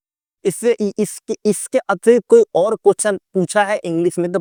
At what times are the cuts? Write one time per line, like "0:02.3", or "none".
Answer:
none